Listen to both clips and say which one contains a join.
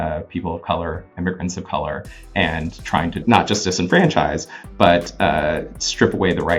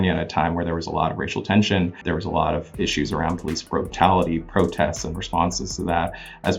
second; 1 cut; at 2.0 s

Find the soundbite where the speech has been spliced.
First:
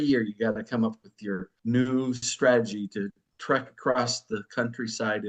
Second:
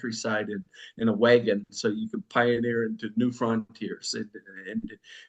first; 2 cuts; at 1.5 s, 3.3 s

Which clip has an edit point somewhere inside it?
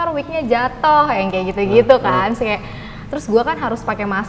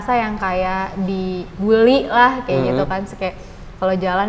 second; 1 cut; at 1.5 s

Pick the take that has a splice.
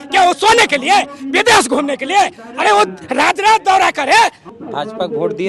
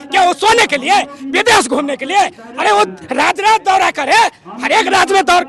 first; 1 cut; at 4.5 s

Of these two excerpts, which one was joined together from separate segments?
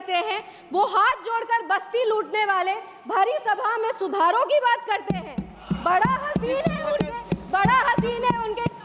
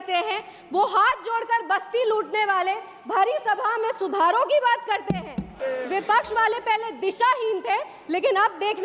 second; 1 cut; at 5.6 s

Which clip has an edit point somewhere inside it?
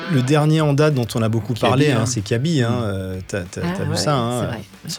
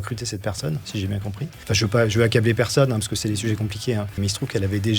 second; 2 cuts; at 1.5 s, 4.2 s

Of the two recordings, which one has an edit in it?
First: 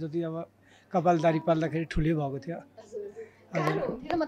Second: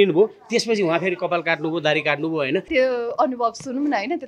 second; 1 cut; at 2.7 s

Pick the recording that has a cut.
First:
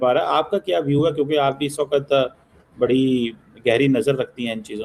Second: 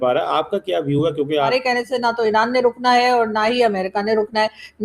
second; 1 cut; at 1.5 s

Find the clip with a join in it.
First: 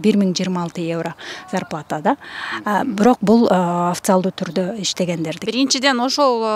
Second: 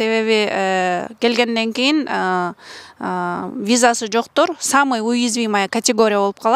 first; 1 cut; at 5.4 s

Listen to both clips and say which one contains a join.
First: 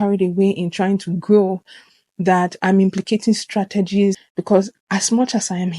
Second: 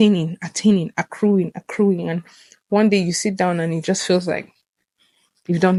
first; 1 cut; at 4.2 s

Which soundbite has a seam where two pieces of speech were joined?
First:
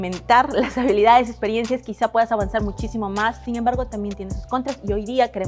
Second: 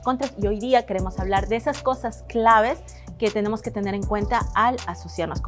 first; 1 cut; at 3.4 s

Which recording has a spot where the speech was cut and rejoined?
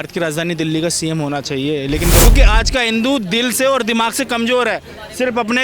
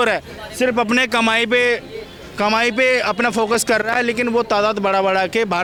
first; 1 cut; at 2.3 s

